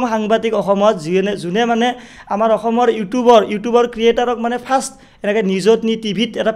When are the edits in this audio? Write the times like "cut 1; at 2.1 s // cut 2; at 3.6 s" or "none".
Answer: none

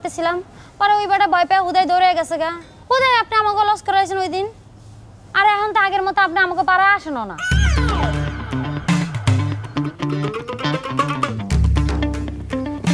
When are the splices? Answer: cut 1; at 7.6 s

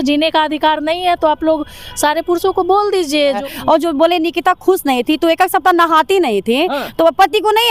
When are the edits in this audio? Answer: cut 1; at 3.4 s

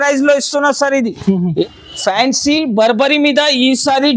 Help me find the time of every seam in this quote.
cut 1; at 1.6 s

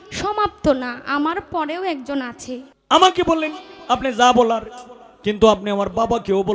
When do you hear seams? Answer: cut 1; at 2.7 s

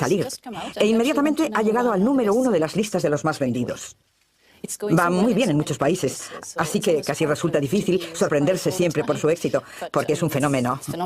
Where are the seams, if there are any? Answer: cut 1; at 6.0 s

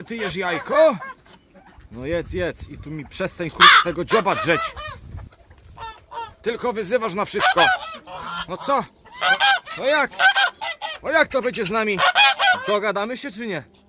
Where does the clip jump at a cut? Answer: none

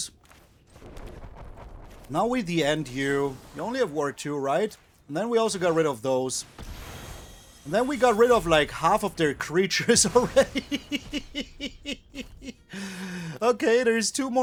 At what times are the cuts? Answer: none

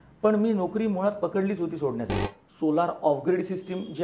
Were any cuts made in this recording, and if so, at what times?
cut 1; at 2.2 s

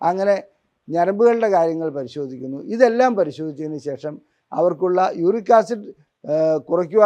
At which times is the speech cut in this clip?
none

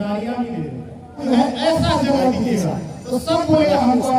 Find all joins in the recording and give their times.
cut 1; at 1.2 s

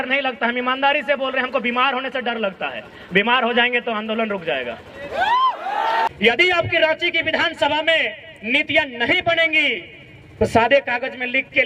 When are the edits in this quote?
cut 1; at 6.1 s

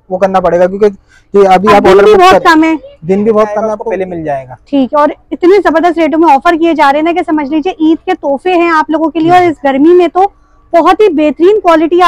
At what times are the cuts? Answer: cut 1; at 3.7 s

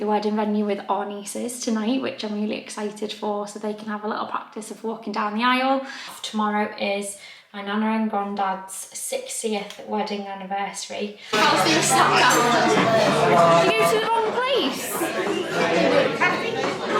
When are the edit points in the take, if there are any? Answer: cut 1; at 6.2 s // cut 2; at 11.3 s

